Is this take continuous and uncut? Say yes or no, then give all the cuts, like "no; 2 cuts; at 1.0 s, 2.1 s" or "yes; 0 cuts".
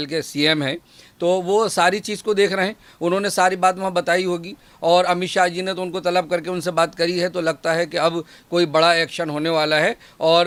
yes; 0 cuts